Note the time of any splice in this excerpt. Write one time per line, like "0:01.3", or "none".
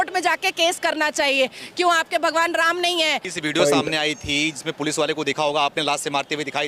0:03.3